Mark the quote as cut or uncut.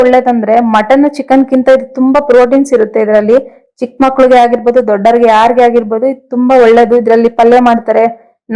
uncut